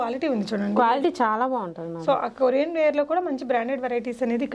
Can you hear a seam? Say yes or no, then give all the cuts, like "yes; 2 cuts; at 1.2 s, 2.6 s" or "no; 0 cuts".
no; 0 cuts